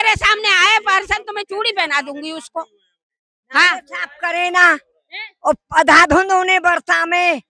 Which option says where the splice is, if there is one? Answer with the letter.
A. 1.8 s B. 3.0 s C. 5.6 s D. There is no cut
D